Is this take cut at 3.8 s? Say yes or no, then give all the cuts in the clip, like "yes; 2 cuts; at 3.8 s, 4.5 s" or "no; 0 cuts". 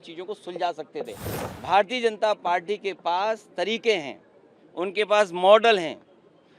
no; 1 cut; at 1.2 s